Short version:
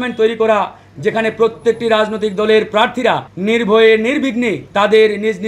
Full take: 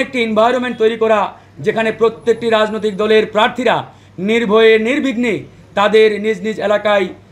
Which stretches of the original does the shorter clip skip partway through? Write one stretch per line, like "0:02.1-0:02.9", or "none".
0:03.9-0:04.1
0:05.4-0:05.6